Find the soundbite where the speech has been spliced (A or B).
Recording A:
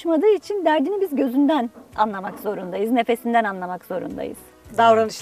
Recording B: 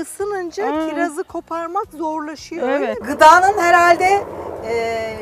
B